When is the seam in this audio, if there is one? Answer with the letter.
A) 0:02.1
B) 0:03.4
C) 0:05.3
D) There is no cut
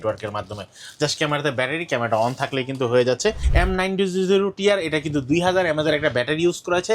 B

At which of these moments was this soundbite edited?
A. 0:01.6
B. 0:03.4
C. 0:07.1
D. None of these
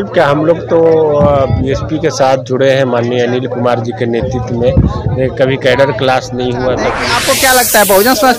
C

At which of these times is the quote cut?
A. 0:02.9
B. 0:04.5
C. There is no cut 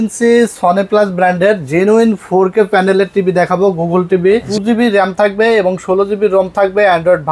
B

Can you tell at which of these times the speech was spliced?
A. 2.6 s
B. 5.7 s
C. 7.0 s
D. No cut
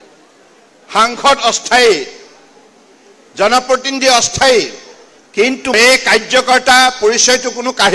B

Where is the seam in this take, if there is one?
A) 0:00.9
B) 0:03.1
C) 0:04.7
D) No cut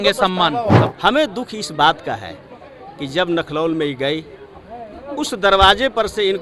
A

